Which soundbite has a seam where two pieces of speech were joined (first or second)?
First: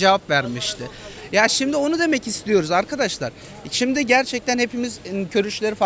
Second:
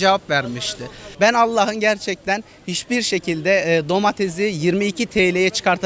second